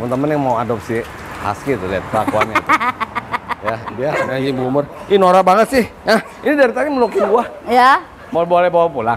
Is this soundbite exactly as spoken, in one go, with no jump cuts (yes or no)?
no